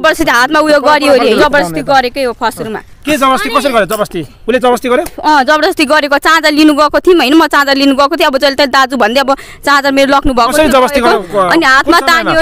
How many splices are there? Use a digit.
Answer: 1